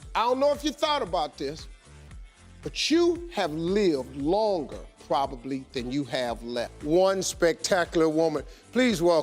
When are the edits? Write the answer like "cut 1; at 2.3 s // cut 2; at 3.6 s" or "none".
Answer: cut 1; at 6.5 s